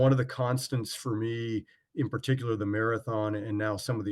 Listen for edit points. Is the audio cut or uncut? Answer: uncut